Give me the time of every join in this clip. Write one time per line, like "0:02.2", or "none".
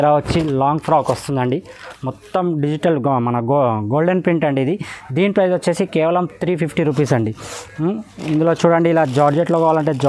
none